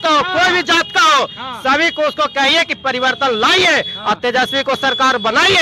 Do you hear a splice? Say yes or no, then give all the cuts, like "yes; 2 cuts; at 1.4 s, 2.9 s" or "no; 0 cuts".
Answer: no; 0 cuts